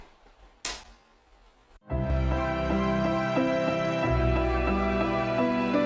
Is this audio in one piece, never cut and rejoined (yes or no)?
no